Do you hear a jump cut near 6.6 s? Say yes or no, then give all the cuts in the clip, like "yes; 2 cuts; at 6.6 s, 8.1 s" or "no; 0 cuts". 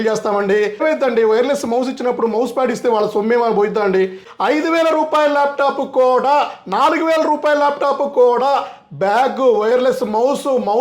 no; 2 cuts; at 0.8 s, 4.3 s